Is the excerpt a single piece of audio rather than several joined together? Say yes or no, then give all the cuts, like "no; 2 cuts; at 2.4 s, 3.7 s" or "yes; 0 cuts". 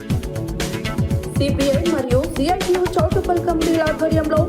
no; 1 cut; at 1.0 s